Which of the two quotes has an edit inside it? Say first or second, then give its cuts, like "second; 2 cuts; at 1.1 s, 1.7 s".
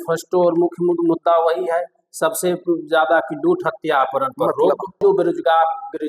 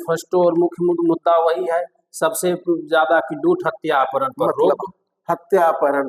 first; 1 cut; at 5.0 s